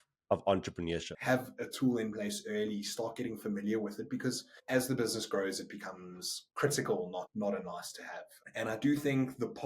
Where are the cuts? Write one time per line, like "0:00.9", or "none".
0:01.1